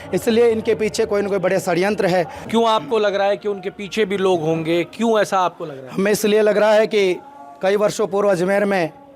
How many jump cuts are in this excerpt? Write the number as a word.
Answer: one